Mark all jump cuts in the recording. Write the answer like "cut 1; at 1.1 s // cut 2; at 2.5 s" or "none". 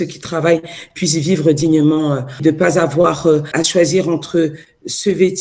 cut 1; at 2.4 s // cut 2; at 3.5 s